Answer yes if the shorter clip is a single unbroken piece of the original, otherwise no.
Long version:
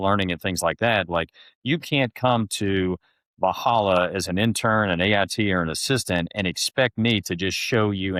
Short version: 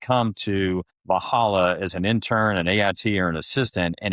no